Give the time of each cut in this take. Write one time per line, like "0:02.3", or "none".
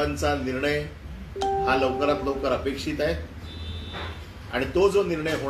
none